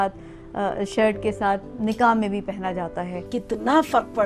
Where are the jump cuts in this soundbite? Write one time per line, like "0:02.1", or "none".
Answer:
0:03.3